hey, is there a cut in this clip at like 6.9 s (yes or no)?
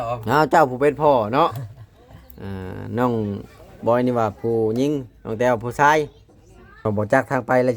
yes